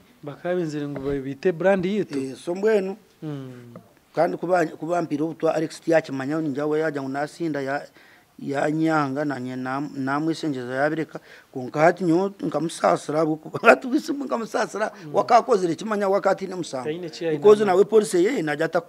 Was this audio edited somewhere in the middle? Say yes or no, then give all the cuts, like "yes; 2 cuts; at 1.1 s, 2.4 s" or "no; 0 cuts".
no; 0 cuts